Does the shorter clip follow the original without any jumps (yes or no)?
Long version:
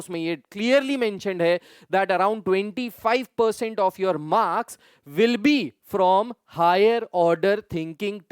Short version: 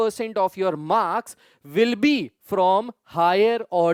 yes